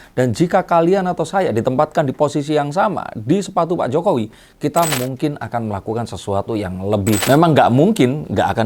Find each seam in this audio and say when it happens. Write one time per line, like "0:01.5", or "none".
0:07.2